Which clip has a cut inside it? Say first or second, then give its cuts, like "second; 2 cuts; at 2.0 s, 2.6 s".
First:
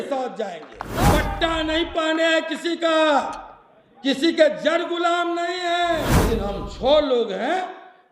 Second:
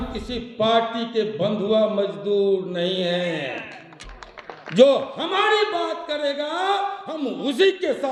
first; 2 cuts; at 1.1 s, 6.2 s